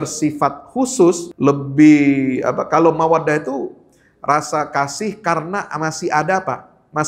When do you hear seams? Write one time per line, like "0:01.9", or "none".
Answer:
0:01.3